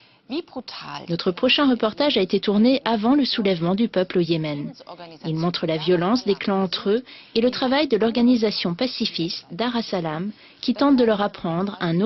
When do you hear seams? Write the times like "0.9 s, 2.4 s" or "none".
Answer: 5.5 s